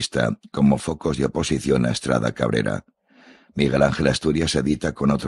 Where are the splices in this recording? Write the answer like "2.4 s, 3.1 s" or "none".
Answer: 4.2 s